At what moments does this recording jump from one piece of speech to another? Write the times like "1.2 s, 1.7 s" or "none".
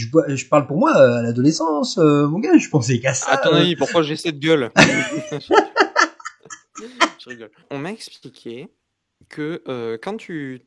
7.6 s